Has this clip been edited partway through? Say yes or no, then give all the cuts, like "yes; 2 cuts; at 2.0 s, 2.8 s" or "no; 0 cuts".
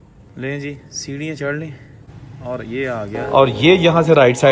yes; 1 cut; at 3.1 s